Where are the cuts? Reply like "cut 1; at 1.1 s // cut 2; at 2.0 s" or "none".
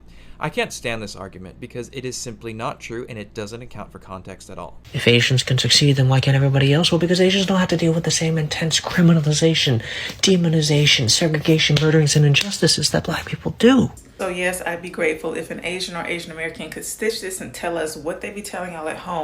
cut 1; at 4.8 s // cut 2; at 14.0 s